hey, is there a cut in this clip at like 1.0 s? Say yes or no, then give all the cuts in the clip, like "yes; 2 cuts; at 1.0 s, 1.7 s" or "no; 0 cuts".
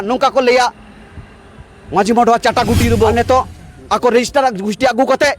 no; 1 cut; at 3.1 s